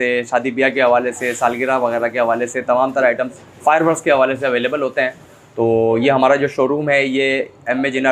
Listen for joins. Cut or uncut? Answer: uncut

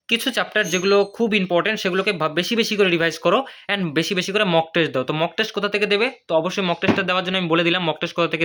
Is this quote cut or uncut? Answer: uncut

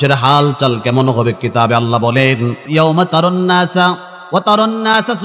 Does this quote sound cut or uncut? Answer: cut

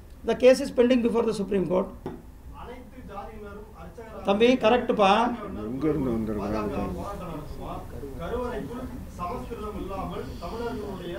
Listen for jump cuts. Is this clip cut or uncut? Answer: cut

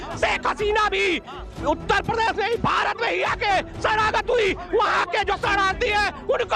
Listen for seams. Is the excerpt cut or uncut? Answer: uncut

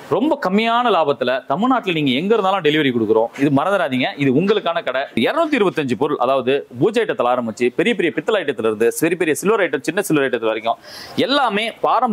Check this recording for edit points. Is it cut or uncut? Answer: cut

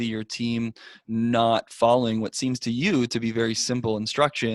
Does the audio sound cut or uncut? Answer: uncut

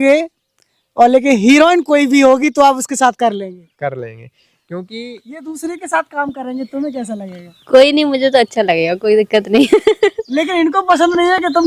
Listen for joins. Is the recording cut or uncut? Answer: uncut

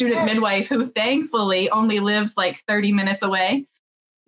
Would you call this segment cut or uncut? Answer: uncut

